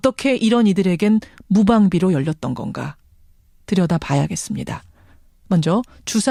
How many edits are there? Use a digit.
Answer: 0